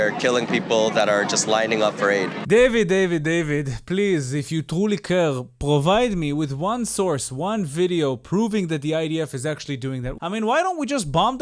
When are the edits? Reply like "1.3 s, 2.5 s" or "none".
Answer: 2.3 s, 10.1 s